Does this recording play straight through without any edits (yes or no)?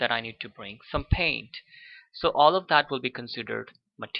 no